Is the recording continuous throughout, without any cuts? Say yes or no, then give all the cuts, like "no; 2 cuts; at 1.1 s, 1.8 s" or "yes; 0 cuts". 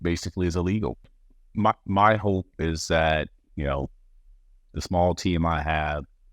no; 1 cut; at 1.2 s